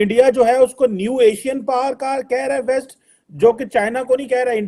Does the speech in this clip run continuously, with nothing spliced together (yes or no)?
yes